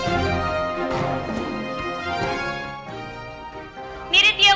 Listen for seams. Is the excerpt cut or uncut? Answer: cut